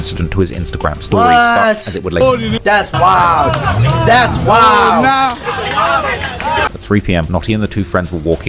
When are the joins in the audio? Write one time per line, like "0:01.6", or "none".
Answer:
0:02.2
0:06.7